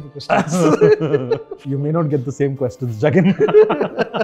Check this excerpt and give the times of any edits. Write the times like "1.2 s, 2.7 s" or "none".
1.6 s